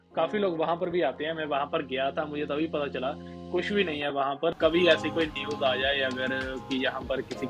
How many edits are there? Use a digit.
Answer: 1